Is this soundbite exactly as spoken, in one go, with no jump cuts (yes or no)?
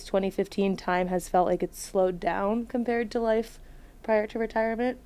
yes